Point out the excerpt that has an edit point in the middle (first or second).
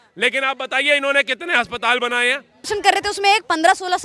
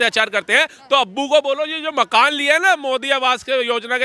first